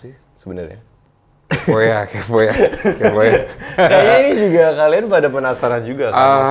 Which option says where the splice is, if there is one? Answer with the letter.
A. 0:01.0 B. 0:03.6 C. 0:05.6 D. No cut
D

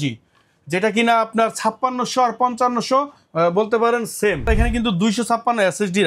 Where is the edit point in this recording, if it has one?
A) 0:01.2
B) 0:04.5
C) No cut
B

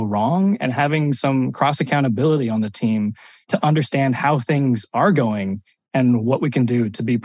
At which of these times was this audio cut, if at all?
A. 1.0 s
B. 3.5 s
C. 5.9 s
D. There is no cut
B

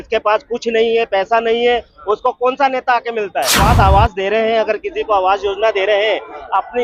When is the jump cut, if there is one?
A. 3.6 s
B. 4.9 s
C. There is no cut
A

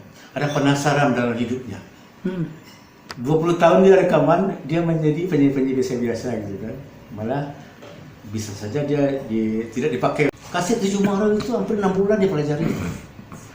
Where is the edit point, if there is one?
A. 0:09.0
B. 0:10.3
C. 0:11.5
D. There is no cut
B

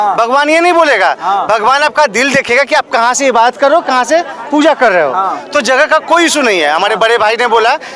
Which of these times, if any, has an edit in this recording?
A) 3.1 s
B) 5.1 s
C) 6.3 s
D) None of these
D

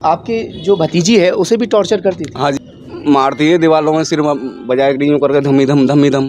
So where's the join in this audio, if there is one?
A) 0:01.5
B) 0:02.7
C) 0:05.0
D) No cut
B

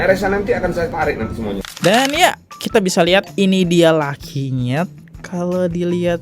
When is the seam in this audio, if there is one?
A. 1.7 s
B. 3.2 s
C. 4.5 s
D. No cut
A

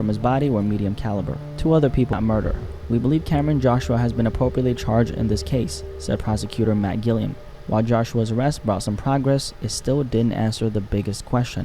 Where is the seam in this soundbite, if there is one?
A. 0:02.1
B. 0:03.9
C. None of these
A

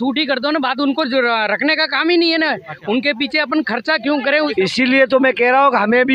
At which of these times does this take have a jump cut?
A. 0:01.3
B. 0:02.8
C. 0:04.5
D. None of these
C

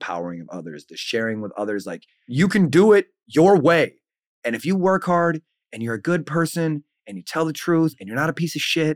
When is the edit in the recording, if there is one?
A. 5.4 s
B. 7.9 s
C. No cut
B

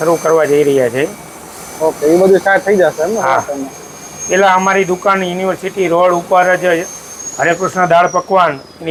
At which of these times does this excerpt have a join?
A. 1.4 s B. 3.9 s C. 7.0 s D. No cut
D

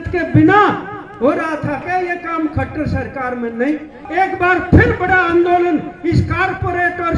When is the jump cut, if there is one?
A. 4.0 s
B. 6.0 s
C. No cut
A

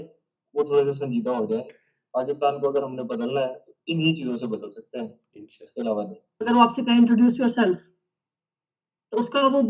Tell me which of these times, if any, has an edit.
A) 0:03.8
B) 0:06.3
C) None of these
B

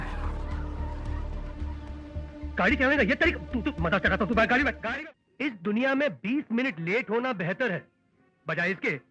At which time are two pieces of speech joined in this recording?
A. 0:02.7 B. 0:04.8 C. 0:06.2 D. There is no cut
B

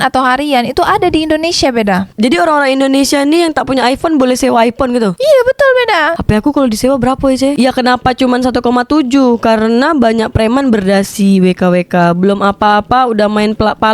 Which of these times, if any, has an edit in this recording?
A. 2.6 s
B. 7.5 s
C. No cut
B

